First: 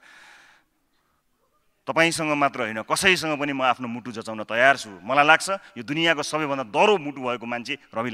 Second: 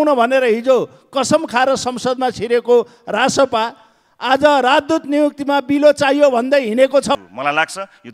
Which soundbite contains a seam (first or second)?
second